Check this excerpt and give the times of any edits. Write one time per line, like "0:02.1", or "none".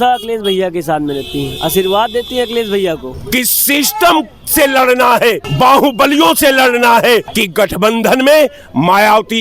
0:03.1
0:05.5
0:07.3